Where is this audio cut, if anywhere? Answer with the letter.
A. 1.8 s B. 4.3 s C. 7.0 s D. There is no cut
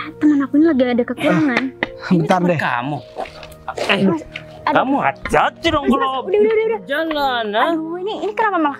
D